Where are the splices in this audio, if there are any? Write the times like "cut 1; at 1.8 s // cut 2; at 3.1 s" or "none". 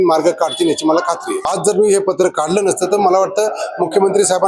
cut 1; at 1.4 s